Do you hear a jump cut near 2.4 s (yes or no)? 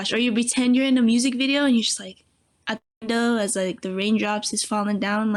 no